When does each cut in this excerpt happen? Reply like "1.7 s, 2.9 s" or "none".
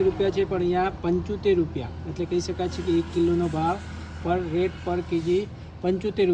none